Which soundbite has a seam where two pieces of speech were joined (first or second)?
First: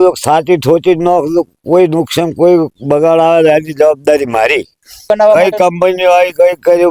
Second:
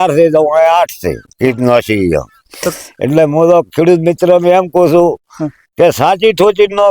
first